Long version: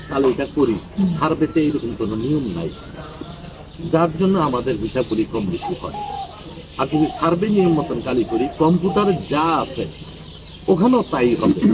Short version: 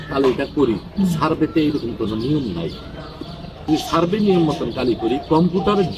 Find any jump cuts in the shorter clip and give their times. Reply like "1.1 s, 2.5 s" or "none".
3.7 s

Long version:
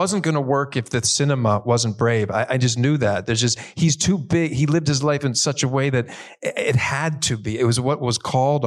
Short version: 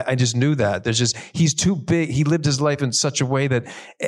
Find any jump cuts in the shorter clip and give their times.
none

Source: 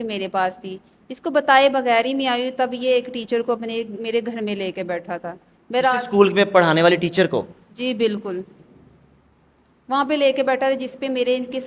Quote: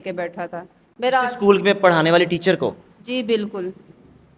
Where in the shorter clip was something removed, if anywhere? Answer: none

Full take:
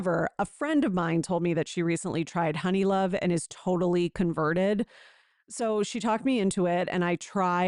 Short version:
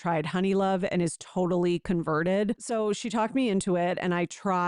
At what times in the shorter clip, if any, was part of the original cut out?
2.6 s

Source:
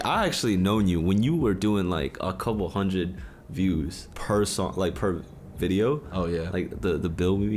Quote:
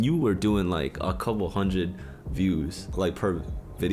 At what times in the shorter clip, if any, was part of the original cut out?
2.9 s

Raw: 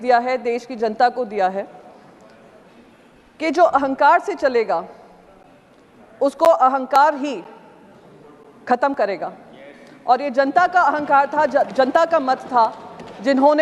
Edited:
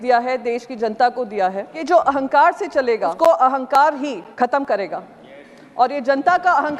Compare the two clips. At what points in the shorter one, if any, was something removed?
1.7 s, 3.1 s, 4.3 s

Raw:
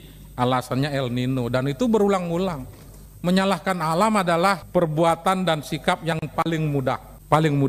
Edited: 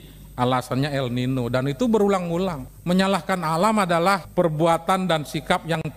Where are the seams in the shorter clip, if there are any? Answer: 2.7 s

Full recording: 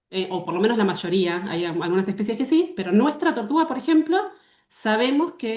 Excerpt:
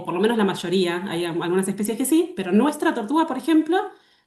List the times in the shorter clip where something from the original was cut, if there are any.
none

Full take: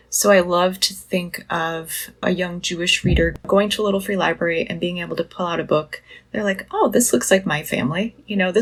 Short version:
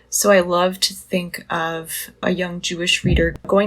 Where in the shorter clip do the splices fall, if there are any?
none

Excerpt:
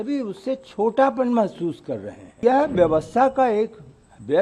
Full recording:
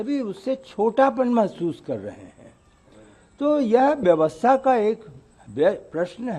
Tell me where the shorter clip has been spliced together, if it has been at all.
2.4 s

